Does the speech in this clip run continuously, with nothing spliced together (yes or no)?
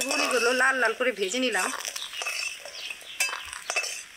yes